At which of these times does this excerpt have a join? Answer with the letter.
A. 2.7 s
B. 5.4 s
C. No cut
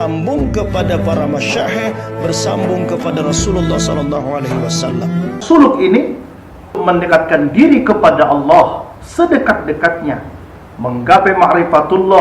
B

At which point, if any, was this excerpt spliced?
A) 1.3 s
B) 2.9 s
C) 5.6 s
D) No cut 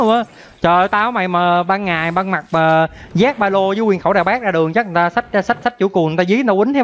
C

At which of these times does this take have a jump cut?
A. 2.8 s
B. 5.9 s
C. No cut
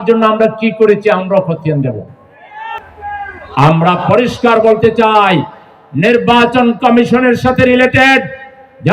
A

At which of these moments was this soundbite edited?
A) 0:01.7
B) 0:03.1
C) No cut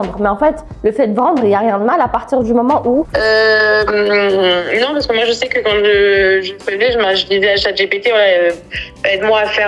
B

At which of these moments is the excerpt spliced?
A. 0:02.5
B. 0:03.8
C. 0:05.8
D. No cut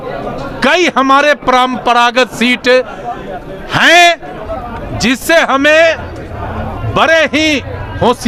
D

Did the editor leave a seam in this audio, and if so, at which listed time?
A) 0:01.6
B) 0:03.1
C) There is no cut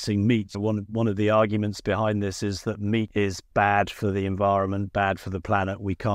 B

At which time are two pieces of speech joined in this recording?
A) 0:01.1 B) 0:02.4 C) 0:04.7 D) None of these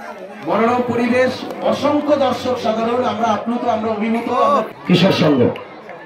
C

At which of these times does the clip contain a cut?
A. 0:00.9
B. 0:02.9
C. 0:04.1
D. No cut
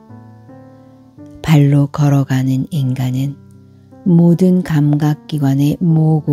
A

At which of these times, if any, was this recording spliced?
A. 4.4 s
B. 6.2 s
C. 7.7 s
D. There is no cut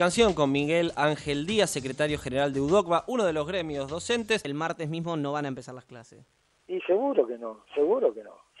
A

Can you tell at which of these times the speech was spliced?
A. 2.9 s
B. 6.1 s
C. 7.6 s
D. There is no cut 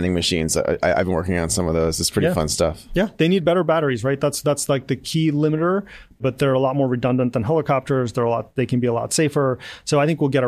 B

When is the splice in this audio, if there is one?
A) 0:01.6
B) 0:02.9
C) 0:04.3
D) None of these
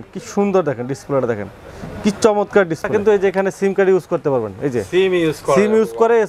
B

